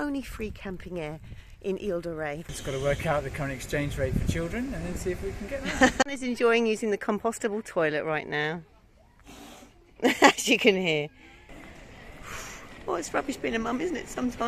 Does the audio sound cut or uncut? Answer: cut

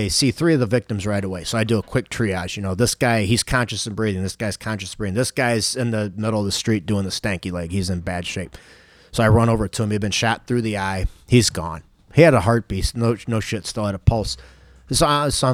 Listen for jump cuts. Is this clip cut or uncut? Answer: uncut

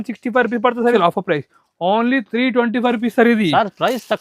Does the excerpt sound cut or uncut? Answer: cut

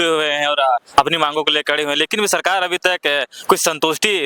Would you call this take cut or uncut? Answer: uncut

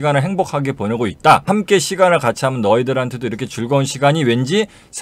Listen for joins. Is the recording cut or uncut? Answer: cut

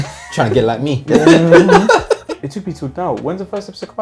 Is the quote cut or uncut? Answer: cut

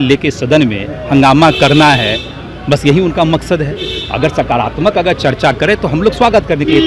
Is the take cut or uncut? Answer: uncut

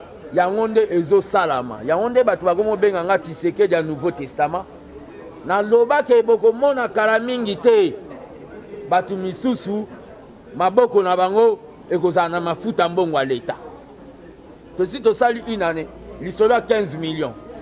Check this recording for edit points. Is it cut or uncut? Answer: uncut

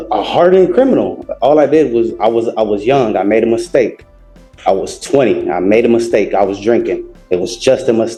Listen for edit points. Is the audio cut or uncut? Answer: uncut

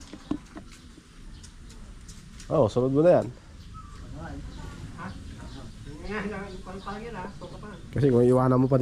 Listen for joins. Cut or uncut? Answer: uncut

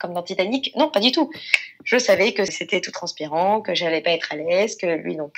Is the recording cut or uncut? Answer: cut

